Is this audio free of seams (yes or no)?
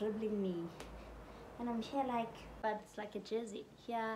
no